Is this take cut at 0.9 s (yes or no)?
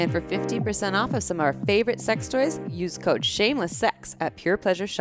no